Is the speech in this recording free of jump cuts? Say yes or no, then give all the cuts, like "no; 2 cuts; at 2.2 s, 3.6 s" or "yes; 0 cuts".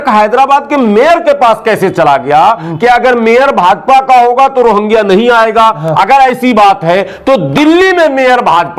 yes; 0 cuts